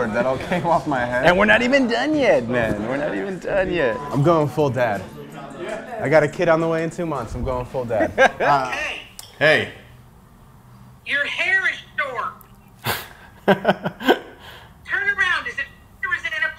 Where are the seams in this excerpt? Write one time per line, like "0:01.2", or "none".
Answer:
0:04.0
0:08.6